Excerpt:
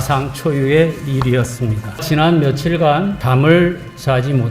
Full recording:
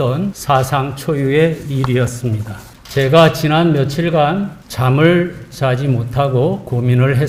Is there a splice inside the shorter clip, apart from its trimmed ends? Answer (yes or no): yes